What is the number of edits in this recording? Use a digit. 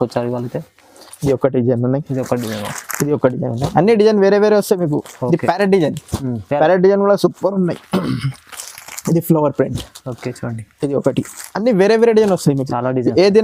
0